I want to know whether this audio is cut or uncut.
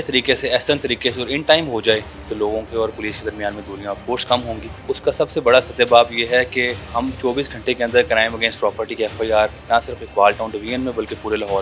cut